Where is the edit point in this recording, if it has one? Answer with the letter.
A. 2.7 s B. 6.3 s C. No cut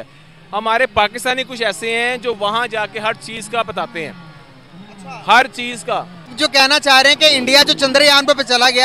B